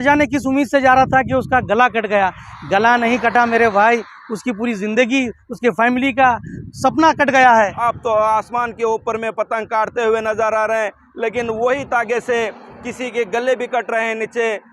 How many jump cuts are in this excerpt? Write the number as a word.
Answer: one